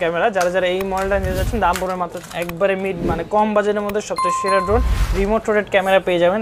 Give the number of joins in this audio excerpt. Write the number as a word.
one